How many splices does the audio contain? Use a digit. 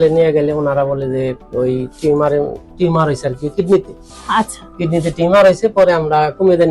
0